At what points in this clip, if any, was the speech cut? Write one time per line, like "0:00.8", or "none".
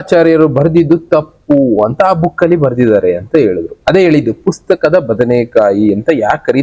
none